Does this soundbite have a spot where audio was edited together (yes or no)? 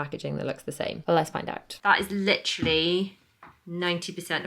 yes